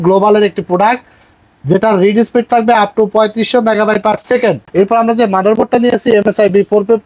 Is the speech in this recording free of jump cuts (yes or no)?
no